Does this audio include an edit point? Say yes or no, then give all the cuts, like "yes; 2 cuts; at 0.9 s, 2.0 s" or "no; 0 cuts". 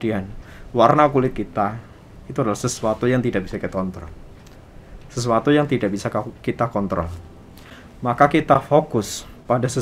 no; 0 cuts